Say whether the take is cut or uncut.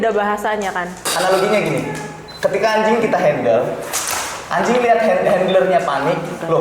cut